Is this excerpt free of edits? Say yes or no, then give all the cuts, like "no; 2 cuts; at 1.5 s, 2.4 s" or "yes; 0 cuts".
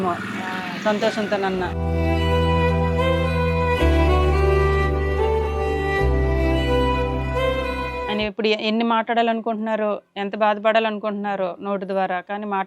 no; 1 cut; at 8.1 s